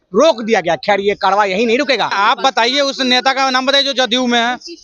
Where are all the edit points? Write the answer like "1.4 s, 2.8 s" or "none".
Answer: 2.1 s